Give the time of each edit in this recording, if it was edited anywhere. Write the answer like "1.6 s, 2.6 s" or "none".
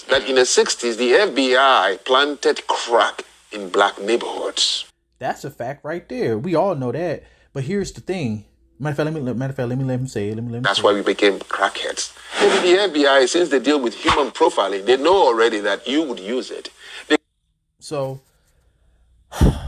none